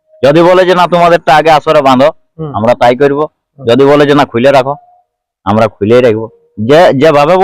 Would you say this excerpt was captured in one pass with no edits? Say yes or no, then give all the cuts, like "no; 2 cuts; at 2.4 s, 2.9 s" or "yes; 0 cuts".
yes; 0 cuts